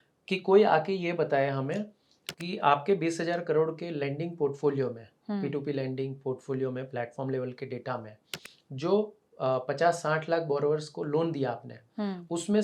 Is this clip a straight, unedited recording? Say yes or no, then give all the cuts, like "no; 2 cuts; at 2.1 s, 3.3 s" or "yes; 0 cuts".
yes; 0 cuts